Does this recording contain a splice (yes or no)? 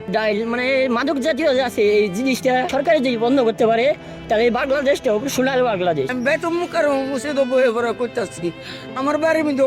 yes